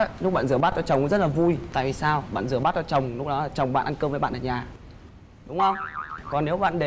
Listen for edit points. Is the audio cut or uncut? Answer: uncut